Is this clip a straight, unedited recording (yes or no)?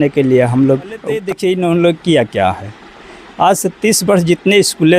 no